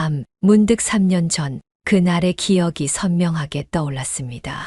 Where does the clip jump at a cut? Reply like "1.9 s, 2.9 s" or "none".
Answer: none